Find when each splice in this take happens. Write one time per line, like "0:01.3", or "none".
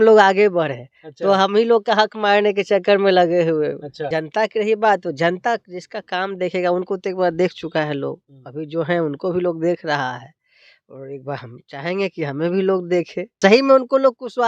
0:03.9
0:13.3